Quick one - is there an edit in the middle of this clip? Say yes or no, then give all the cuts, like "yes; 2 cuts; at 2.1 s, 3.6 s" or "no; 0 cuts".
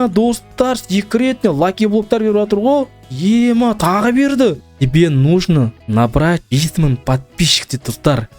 yes; 3 cuts; at 4.6 s, 5.8 s, 6.4 s